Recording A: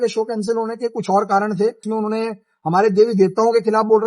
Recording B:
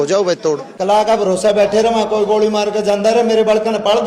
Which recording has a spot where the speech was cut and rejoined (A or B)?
A